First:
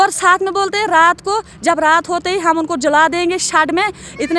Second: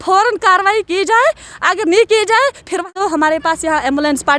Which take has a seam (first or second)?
second